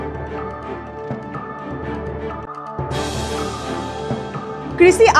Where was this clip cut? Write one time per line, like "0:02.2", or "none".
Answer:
0:02.4

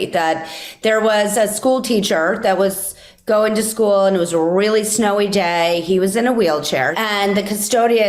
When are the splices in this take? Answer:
0:06.9

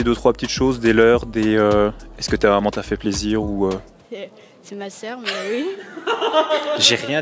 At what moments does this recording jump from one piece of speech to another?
none

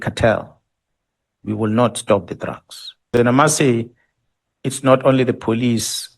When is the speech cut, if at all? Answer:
0:03.1

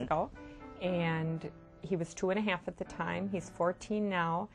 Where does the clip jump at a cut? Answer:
none

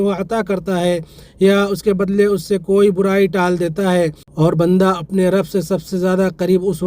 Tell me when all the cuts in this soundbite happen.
0:04.2

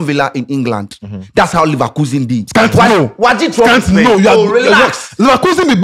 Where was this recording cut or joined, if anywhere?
none

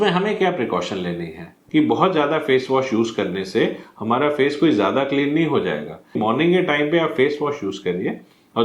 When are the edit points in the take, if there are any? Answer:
0:01.5
0:06.2

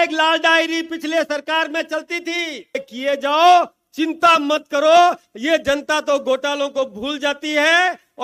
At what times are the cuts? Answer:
0:02.8

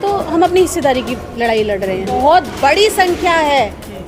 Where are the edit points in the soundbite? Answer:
0:02.2

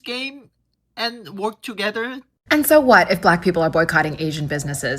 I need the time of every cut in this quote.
0:02.3

